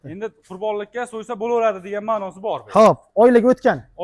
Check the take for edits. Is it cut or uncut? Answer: uncut